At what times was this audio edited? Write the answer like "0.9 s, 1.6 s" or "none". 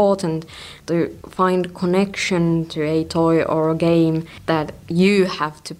1.0 s